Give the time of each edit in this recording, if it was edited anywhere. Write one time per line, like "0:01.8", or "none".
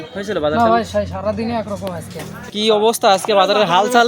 0:02.4